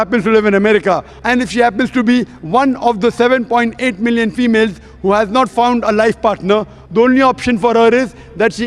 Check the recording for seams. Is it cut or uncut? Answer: cut